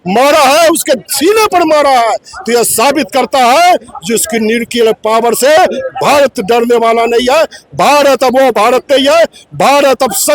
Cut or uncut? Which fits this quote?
uncut